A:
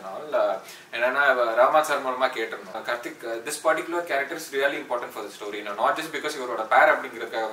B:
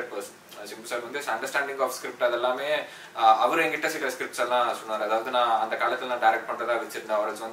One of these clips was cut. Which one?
A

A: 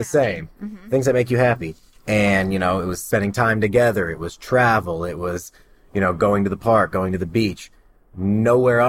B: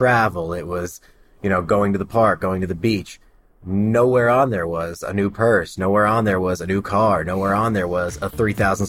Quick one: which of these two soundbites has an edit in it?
A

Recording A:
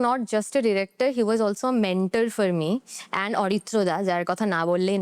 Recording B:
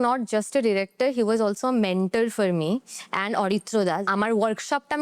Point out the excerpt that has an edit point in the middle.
B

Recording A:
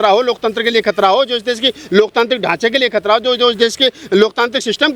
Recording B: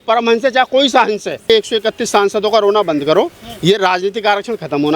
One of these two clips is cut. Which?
B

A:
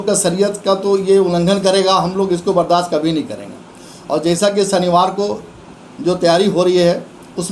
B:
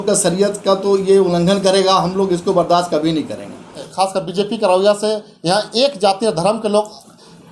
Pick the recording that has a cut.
B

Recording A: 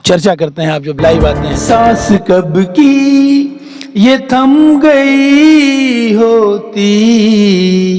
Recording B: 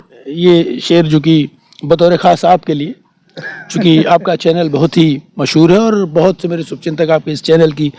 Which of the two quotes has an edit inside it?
A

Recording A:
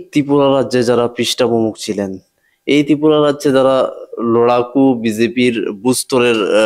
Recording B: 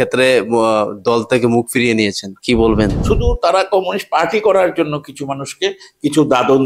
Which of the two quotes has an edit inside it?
B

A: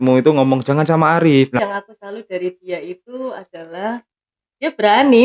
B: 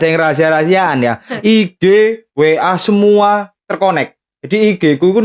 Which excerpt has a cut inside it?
A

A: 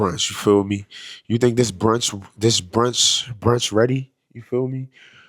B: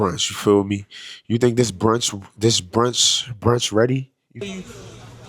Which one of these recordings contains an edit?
B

